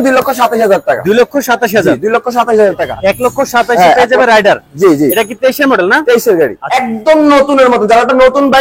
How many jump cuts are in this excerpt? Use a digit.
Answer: 2